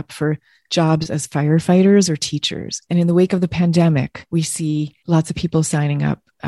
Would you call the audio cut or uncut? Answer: cut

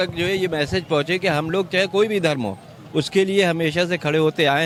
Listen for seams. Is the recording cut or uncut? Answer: uncut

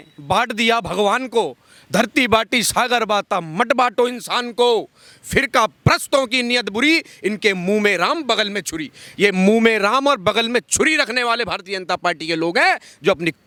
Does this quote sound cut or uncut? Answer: uncut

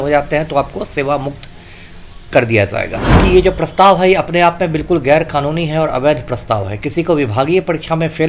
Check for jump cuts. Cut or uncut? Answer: cut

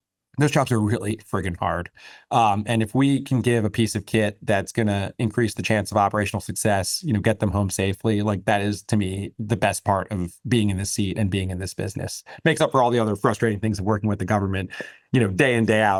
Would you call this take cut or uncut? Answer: uncut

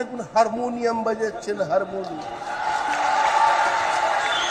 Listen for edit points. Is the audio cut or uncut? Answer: uncut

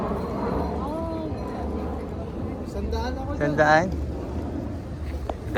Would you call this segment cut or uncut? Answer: uncut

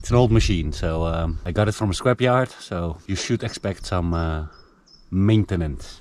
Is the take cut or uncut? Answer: cut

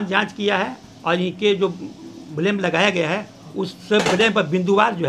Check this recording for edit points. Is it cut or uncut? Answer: uncut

